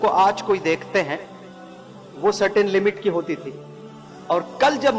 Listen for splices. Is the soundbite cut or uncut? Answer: uncut